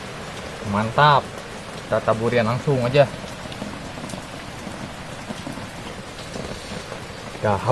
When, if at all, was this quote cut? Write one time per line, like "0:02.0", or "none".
0:05.8